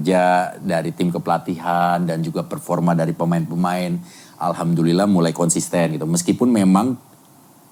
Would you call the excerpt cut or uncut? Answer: uncut